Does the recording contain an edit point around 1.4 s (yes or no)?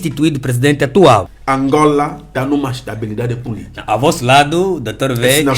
yes